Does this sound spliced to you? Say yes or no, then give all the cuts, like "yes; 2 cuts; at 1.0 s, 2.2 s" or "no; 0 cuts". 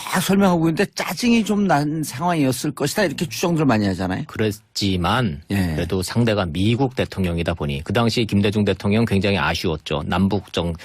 yes; 1 cut; at 1.4 s